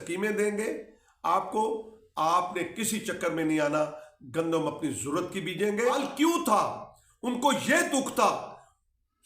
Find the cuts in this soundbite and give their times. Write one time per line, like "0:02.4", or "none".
0:06.0